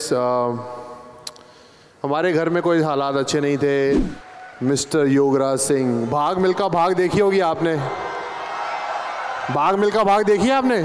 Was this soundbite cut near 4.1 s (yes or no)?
yes